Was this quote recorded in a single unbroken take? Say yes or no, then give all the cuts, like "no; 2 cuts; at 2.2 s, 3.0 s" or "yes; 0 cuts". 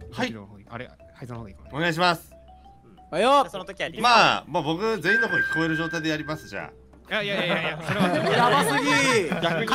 yes; 0 cuts